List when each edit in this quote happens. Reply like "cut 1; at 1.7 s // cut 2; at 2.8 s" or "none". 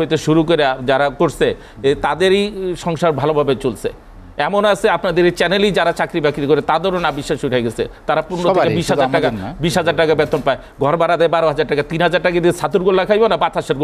none